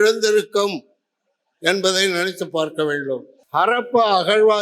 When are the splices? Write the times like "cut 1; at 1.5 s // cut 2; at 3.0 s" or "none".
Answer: cut 1; at 3.4 s